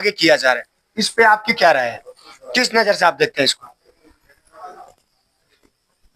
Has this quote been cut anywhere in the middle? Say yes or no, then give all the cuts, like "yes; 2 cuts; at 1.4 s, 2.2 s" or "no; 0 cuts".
no; 0 cuts